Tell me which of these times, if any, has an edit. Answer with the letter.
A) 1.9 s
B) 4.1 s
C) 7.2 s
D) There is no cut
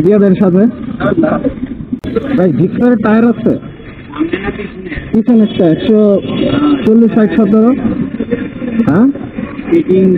A